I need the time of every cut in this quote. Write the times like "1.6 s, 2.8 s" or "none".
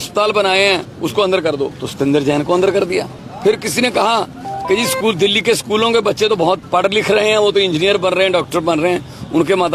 0.9 s, 1.8 s, 3.2 s, 6.6 s